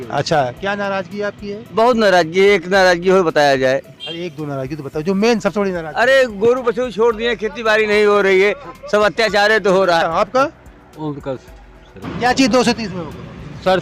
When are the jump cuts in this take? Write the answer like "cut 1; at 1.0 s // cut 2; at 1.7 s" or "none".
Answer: cut 1; at 10.0 s // cut 2; at 12.0 s